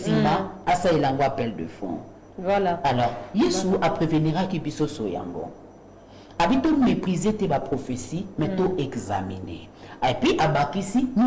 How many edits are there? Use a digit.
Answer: 0